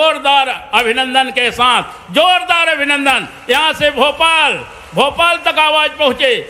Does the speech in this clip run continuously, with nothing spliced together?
yes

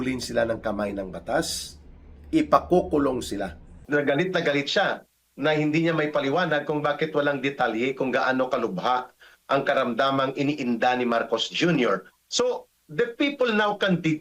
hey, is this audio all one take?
no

